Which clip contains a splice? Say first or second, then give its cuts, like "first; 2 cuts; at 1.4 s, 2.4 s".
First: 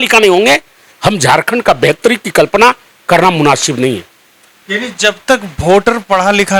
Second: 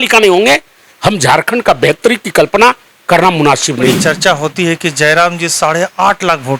second; 1 cut; at 4.0 s